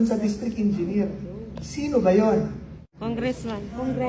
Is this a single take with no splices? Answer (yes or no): no